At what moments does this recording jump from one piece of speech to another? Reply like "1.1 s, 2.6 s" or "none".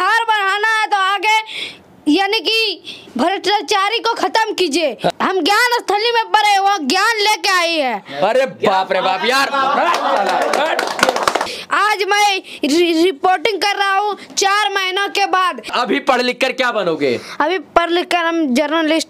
5.1 s, 11.4 s, 15.7 s